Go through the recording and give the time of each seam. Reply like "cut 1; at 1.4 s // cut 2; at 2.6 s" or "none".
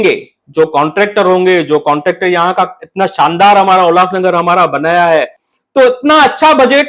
cut 1; at 5.4 s